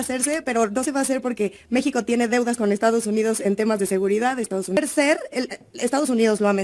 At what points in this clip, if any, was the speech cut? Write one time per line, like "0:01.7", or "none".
0:04.8